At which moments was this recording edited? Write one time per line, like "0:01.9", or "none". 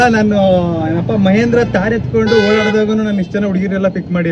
none

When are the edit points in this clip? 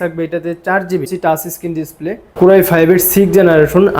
0:01.1
0:02.3

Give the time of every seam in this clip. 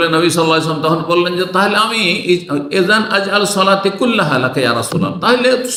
none

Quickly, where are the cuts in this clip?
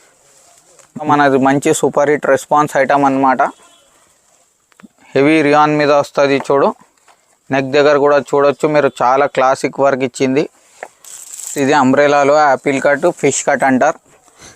0:01.1
0:11.5

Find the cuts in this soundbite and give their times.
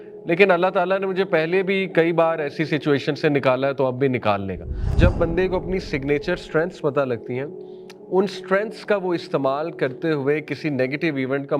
0:04.9

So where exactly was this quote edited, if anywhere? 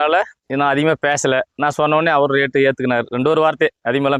none

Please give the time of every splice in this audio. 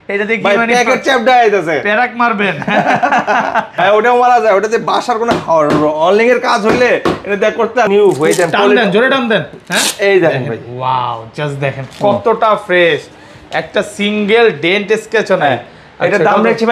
0:03.7
0:07.9

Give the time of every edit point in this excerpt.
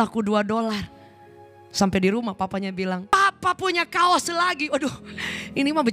0:03.1

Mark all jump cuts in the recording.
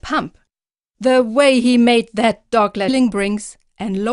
none

